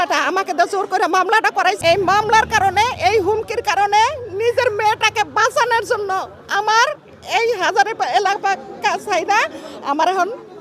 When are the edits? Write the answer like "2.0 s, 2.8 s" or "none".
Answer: 1.8 s